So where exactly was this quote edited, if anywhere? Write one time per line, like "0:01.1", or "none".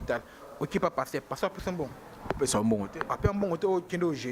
none